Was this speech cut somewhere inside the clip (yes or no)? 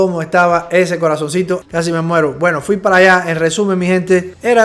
no